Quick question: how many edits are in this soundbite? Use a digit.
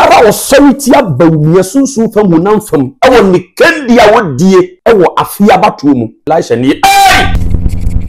3